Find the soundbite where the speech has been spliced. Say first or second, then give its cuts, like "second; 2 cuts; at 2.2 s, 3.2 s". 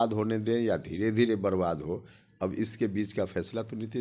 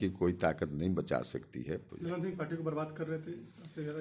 second; 1 cut; at 1.9 s